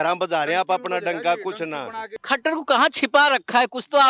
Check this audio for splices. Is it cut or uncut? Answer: cut